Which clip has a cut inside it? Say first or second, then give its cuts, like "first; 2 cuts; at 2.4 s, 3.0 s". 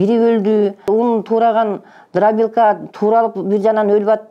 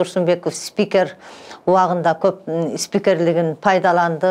first; 1 cut; at 0.9 s